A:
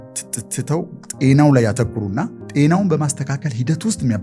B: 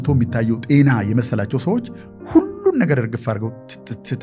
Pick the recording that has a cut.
A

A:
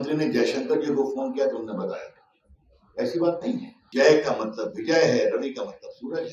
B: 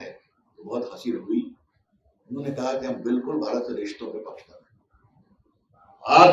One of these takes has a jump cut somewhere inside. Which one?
A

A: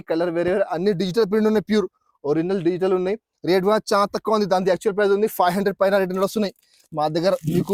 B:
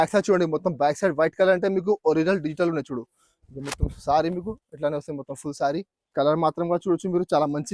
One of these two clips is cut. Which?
B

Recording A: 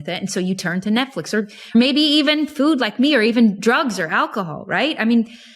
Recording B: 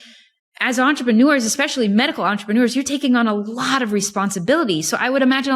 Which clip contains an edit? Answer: A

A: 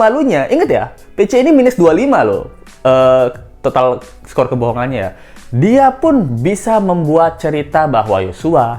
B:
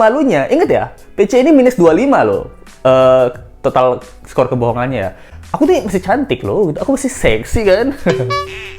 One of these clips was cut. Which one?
B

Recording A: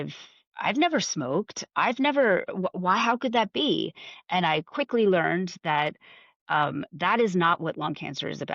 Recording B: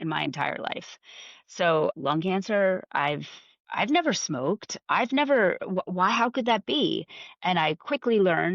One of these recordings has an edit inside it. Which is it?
B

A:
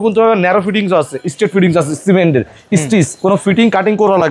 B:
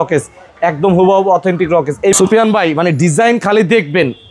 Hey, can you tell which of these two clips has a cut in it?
B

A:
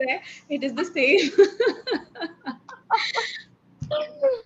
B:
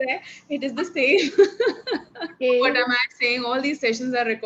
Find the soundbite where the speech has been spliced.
B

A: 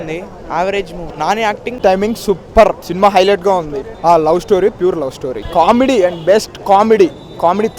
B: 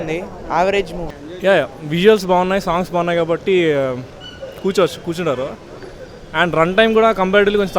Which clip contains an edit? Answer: B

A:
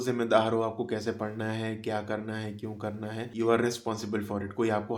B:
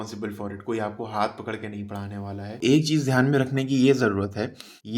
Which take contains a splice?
B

